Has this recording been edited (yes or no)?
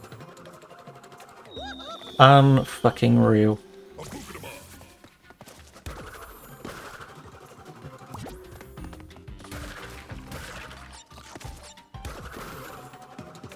no